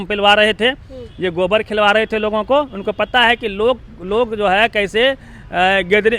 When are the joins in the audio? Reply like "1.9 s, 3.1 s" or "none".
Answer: none

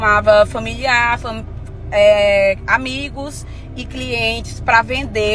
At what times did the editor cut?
none

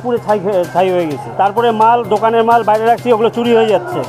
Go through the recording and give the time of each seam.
1.2 s

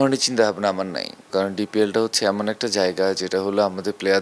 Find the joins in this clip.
1.2 s

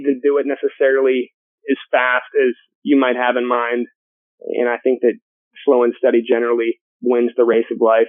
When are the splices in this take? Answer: 6.9 s

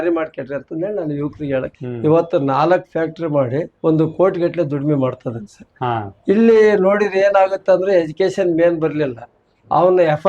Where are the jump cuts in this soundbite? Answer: 1.8 s, 3.7 s

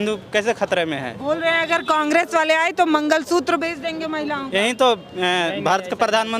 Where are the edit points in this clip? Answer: none

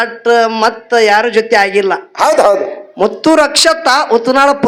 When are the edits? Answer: none

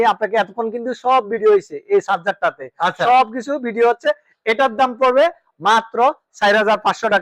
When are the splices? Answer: none

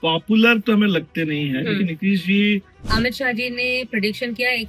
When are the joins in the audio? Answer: 2.8 s

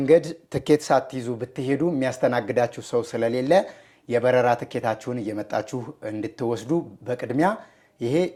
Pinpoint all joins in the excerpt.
none

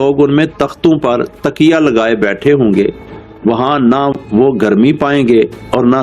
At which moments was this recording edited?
none

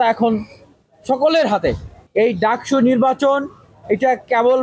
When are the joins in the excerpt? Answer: none

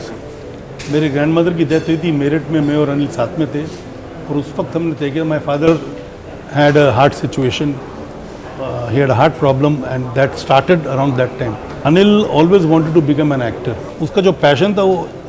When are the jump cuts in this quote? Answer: 11.7 s, 14.0 s

